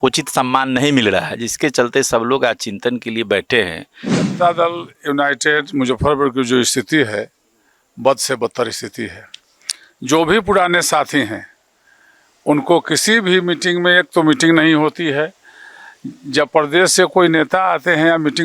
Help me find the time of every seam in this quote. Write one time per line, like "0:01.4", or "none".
0:04.2